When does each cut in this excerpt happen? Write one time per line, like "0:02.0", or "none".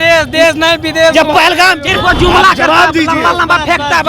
0:01.9